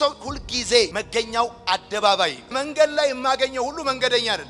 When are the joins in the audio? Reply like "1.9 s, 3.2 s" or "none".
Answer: 2.5 s